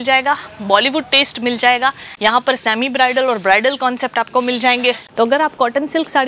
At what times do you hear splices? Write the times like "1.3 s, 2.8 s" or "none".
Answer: 2.1 s, 5.0 s